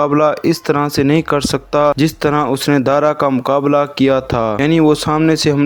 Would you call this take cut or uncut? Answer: uncut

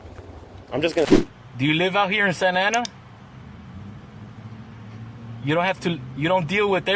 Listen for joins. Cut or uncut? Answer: cut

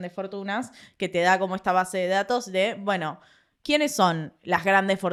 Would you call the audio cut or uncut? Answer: uncut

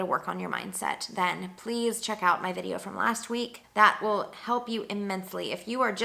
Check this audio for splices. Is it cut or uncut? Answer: cut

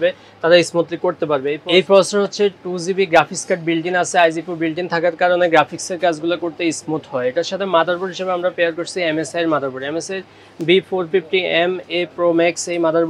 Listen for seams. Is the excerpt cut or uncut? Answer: uncut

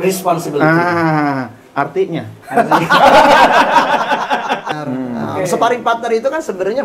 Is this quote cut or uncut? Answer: cut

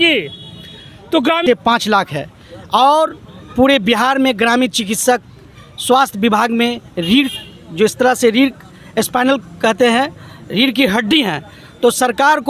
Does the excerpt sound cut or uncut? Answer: cut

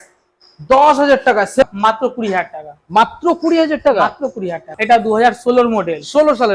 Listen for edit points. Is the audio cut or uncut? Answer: cut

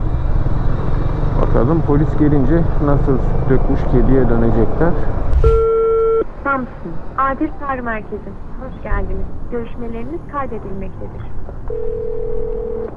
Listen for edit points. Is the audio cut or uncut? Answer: cut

